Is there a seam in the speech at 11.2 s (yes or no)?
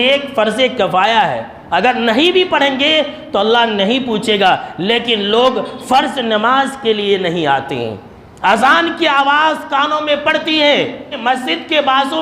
yes